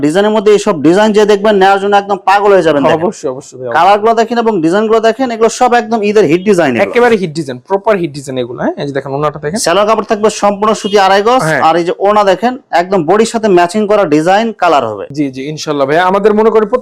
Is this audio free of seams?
yes; 0 cuts

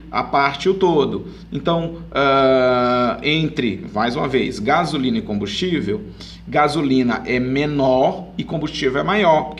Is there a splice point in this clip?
no; 0 cuts

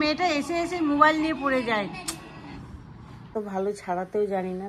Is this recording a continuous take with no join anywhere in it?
no; 1 cut; at 3.3 s

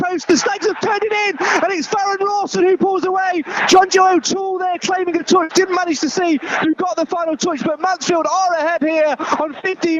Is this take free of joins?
yes; 0 cuts

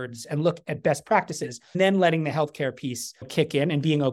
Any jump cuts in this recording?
yes; 1 cut; at 1.8 s

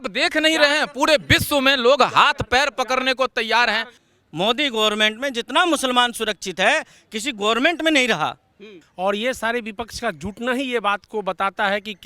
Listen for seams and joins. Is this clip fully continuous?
no; 2 cuts; at 3.9 s, 8.8 s

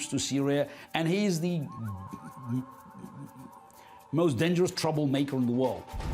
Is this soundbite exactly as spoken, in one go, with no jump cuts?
no; 1 cut; at 2.4 s

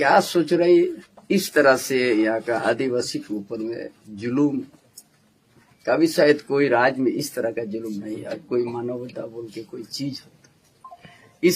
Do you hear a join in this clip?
yes; 1 cut; at 1.1 s

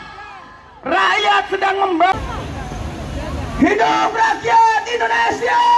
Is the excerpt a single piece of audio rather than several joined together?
no; 1 cut; at 2.2 s

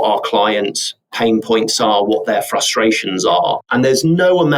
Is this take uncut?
no; 1 cut; at 3.6 s

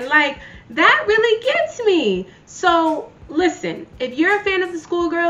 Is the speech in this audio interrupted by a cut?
no; 0 cuts

